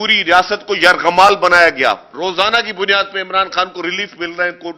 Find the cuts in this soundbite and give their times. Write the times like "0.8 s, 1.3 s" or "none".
2.1 s